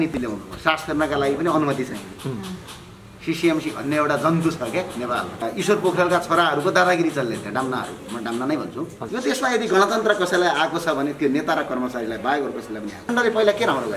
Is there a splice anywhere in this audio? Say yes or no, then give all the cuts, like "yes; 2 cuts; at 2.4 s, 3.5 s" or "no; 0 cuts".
yes; 3 cuts; at 5.4 s, 9.0 s, 13.0 s